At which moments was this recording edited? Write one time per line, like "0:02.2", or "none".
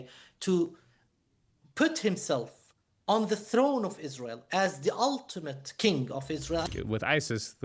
0:06.6